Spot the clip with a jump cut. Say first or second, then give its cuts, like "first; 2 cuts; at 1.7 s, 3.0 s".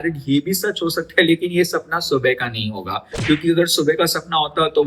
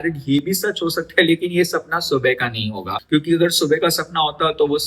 second; 1 cut; at 3.0 s